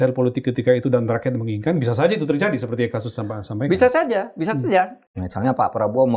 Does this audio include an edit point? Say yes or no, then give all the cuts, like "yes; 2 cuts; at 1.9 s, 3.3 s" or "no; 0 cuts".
yes; 1 cut; at 5.0 s